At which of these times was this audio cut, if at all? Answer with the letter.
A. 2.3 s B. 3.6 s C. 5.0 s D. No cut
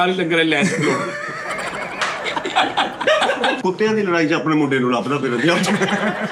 B